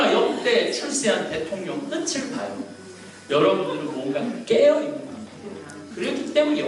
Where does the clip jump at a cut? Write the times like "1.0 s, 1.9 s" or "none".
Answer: 3.2 s